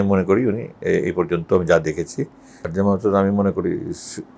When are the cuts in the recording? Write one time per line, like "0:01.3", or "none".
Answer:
0:02.7